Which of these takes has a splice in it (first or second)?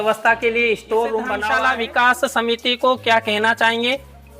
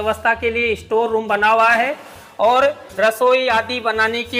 first